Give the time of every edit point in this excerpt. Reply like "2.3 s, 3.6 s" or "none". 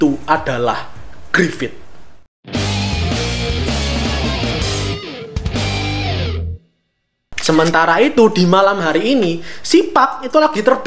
none

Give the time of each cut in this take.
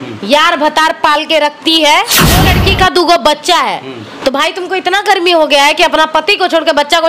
2.4 s

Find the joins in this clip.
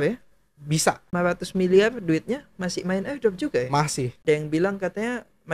1.1 s, 4.2 s

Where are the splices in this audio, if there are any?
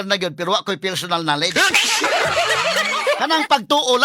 3.0 s

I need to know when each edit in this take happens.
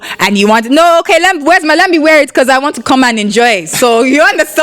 none

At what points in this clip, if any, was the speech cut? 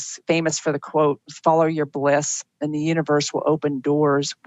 none

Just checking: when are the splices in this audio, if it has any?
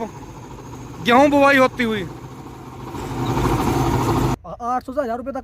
4.4 s

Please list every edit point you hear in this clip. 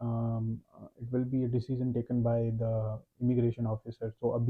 none

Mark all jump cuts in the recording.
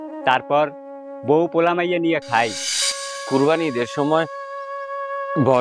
3.1 s

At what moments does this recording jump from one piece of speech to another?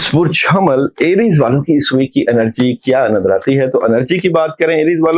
none

